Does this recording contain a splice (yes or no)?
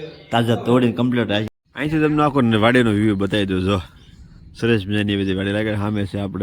yes